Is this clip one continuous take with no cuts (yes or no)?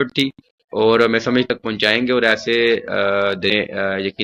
no